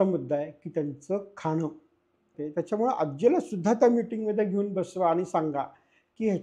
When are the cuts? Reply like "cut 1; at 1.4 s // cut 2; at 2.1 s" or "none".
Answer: cut 1; at 2.4 s